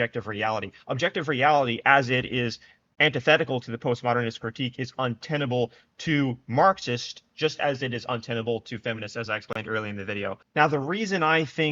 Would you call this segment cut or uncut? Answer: cut